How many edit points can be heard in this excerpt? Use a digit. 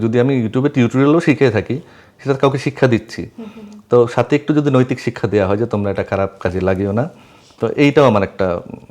0